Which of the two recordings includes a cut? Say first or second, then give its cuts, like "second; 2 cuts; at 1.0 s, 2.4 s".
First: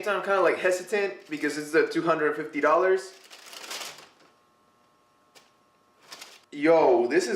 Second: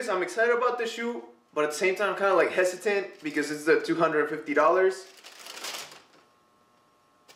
first; 1 cut; at 6.4 s